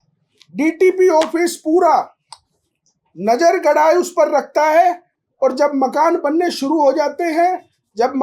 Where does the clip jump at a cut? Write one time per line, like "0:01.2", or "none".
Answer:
none